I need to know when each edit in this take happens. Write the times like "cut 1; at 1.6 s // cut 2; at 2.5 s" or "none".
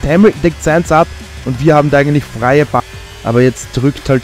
cut 1; at 2.8 s